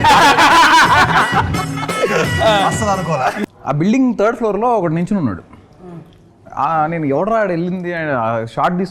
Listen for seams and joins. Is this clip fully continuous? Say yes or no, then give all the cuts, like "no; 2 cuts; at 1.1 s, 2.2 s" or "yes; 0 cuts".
no; 1 cut; at 3.4 s